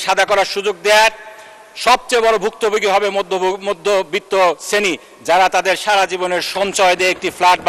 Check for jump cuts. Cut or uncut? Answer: uncut